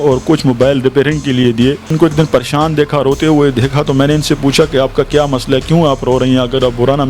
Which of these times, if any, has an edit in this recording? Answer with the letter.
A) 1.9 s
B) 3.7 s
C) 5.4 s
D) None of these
A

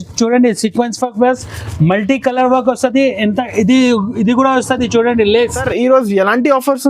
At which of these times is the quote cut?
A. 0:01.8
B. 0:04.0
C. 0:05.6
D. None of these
C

